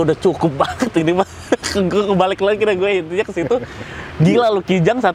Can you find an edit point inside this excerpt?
no; 0 cuts

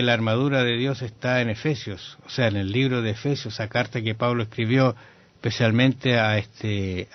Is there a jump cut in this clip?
yes; 1 cut; at 4.6 s

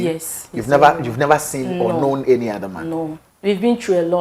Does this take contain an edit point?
yes; 1 cut; at 3.2 s

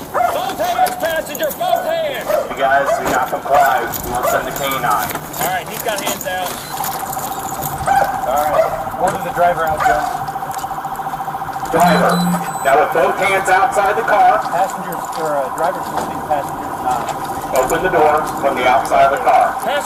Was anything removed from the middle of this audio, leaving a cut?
no; 0 cuts

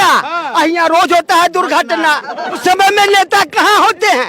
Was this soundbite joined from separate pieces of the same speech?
yes; 1 cut; at 2.6 s

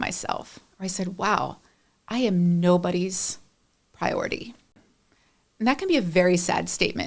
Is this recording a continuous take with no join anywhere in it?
no; 1 cut; at 4.8 s

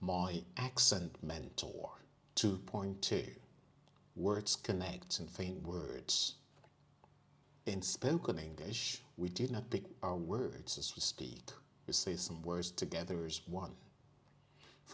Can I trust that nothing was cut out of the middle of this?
no; 1 cut; at 7.4 s

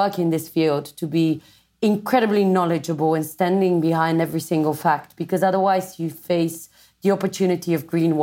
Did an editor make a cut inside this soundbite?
no; 0 cuts

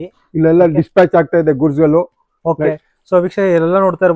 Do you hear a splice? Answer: no; 0 cuts

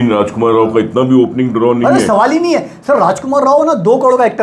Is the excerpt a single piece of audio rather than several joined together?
yes; 0 cuts

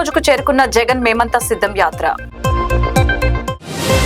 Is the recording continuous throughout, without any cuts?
yes; 0 cuts

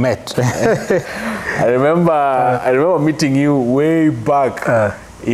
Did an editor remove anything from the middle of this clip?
yes; 1 cut; at 0.9 s

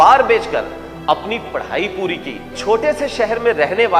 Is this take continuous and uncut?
no; 1 cut; at 2.6 s

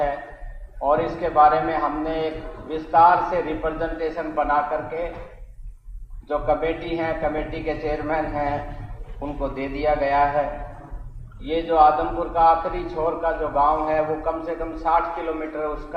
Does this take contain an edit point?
no; 0 cuts

